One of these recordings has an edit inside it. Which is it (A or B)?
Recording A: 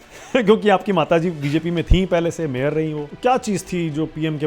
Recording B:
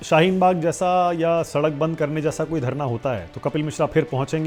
A